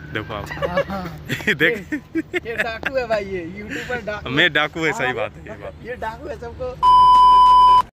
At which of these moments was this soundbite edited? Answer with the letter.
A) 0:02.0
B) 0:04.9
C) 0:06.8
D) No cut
C